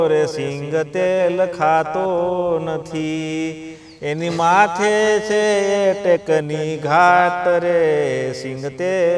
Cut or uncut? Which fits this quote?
uncut